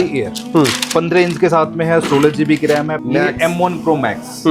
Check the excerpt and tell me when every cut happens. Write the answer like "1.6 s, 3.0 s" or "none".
2.9 s